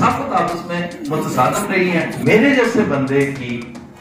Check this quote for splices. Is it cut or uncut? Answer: cut